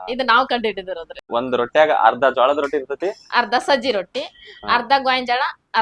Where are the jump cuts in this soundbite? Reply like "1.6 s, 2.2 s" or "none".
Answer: 1.3 s